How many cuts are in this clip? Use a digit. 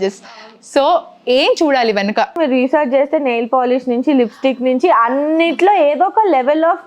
1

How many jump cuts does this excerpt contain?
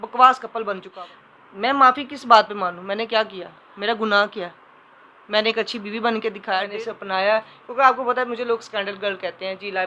2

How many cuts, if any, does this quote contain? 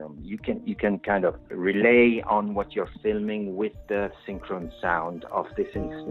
1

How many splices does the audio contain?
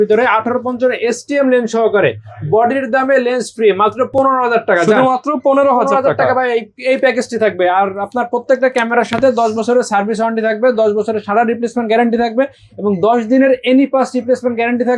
0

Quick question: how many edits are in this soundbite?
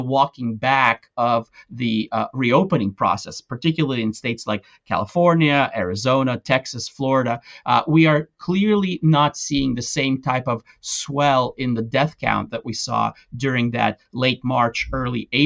0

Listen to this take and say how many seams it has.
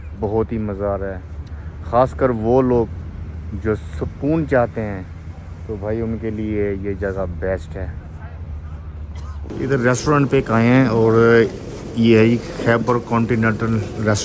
0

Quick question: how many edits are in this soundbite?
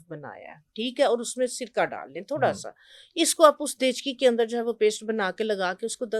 0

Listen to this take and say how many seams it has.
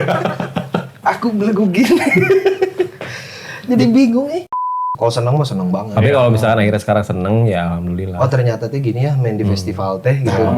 1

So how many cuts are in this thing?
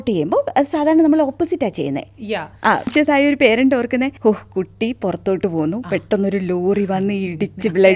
2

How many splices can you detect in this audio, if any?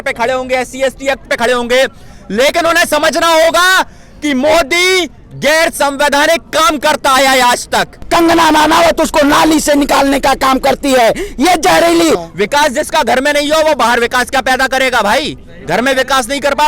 2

